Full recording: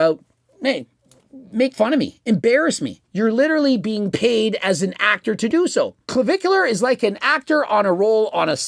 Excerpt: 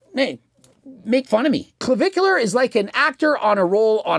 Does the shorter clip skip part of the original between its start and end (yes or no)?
yes